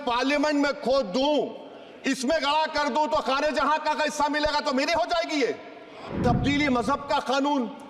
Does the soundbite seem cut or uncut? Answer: cut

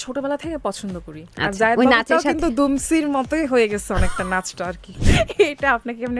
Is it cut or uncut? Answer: cut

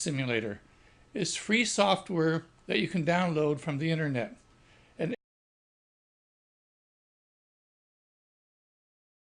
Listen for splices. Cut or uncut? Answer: uncut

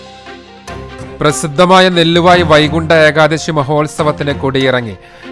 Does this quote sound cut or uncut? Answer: cut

